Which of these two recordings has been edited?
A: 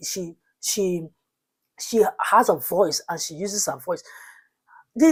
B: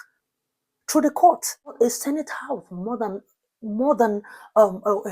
B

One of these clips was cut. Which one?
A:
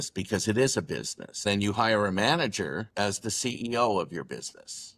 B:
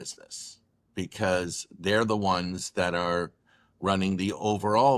A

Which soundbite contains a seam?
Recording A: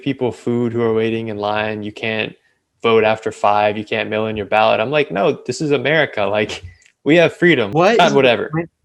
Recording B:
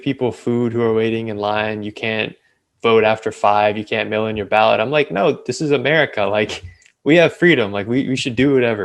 A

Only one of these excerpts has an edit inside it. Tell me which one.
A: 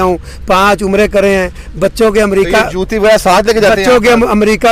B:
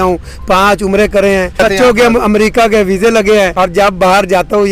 B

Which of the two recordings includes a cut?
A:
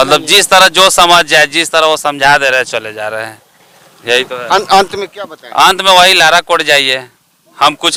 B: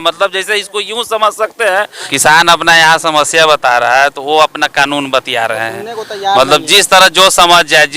B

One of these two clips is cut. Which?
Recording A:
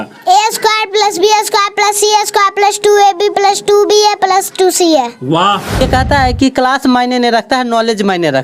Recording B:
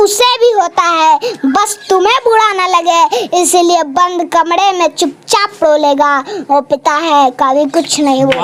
A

